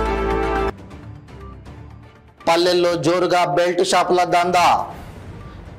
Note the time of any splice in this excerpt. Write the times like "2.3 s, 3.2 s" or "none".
0.7 s, 2.0 s